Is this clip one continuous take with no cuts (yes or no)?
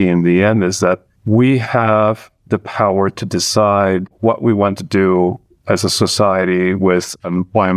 yes